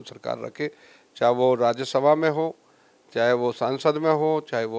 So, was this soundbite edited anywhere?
no; 0 cuts

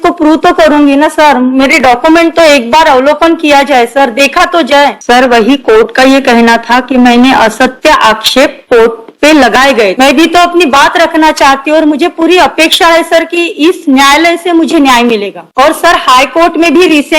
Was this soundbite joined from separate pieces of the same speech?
yes; 2 cuts; at 5.0 s, 9.9 s

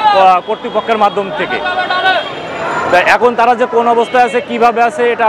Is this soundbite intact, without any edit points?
yes; 0 cuts

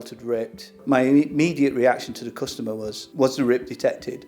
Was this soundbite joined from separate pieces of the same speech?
yes; 1 cut; at 3.0 s

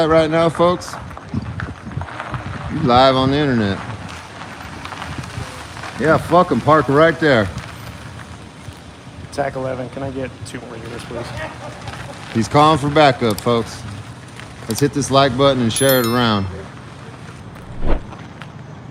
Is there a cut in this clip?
no; 0 cuts

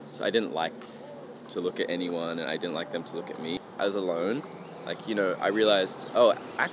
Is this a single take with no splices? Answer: no; 1 cut; at 3.6 s

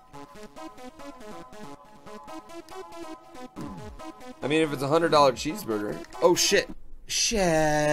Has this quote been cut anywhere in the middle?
no; 0 cuts

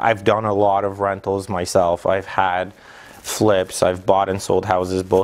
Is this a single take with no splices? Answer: yes; 0 cuts

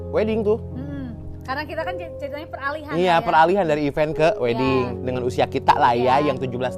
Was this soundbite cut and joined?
no; 0 cuts

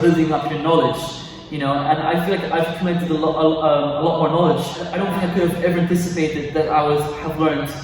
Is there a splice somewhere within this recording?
yes; 1 cut; at 5.0 s

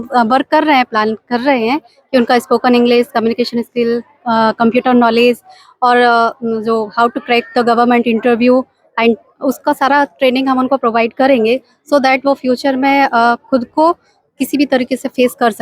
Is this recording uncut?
yes; 0 cuts

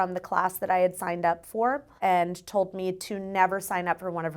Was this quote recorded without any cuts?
no; 1 cut; at 1.9 s

